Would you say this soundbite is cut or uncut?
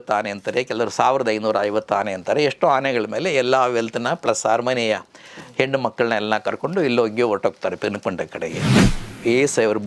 cut